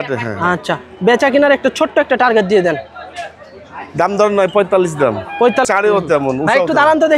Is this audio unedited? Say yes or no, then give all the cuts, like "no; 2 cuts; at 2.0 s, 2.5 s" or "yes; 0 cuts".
no; 1 cut; at 5.7 s